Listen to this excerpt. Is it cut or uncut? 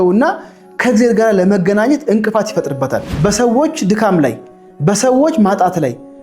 cut